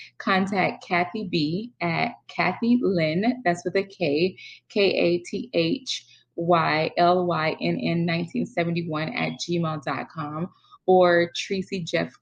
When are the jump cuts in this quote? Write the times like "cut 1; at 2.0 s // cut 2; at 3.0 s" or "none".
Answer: none

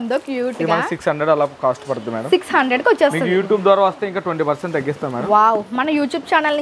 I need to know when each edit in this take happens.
none

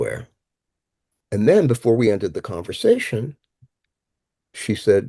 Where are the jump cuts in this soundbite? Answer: none

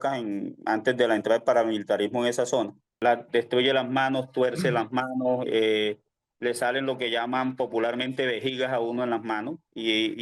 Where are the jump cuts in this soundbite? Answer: cut 1; at 3.0 s

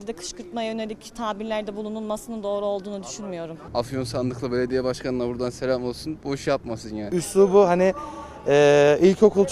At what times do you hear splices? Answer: cut 1; at 3.7 s // cut 2; at 7.1 s

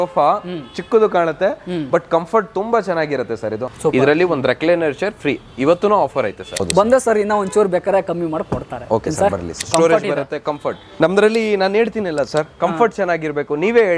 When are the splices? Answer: cut 1; at 3.7 s // cut 2; at 6.6 s // cut 3; at 9.7 s // cut 4; at 10.8 s

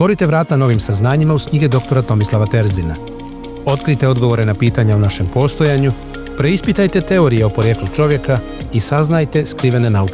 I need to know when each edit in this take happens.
none

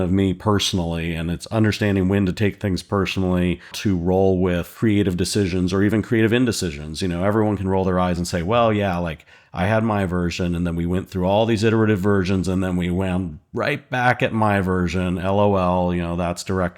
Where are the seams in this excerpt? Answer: cut 1; at 3.8 s

